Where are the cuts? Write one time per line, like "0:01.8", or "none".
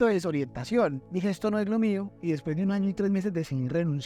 0:01.0

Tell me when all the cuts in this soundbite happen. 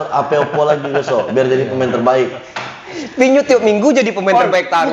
none

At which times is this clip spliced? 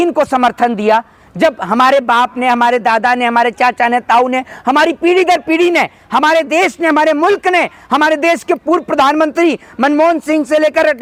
none

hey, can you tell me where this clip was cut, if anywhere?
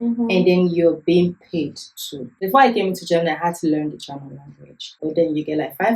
0:02.3
0:05.0

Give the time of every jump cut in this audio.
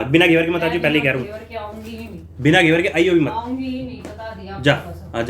none

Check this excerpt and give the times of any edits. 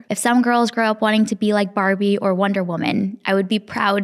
none

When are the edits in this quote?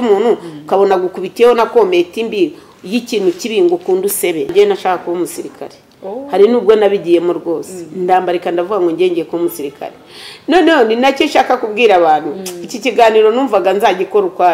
0:04.5

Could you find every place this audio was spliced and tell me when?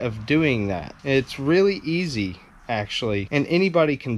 0:00.9
0:03.3

